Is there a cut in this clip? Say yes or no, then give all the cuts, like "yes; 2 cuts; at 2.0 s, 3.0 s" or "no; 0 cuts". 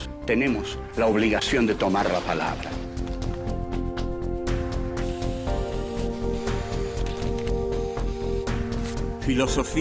yes; 1 cut; at 3.2 s